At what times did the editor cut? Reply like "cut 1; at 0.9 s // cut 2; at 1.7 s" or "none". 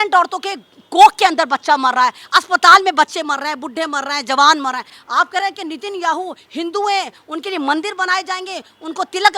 cut 1; at 5.0 s